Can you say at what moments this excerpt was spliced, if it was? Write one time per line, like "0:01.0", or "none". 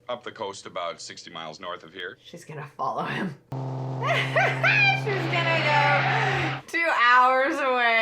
0:03.5